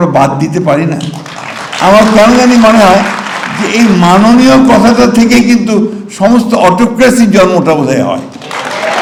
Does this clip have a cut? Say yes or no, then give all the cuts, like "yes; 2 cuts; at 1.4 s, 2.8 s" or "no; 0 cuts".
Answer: no; 0 cuts